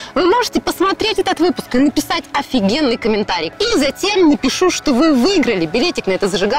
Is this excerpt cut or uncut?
cut